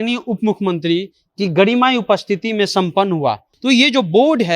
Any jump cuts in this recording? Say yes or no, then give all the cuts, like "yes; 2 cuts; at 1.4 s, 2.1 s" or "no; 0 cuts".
yes; 1 cut; at 3.5 s